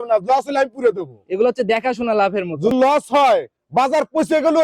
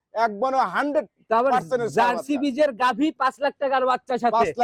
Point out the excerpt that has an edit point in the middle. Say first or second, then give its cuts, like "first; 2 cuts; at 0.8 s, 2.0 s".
first; 1 cut; at 2.7 s